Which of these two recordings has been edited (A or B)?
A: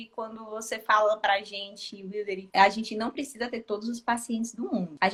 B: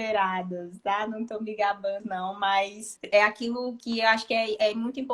B